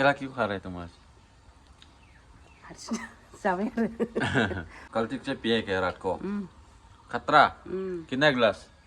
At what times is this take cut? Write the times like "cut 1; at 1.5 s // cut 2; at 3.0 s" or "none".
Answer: cut 1; at 4.8 s